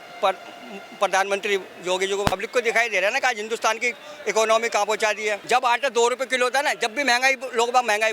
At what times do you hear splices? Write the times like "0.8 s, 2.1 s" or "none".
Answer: 2.3 s, 5.4 s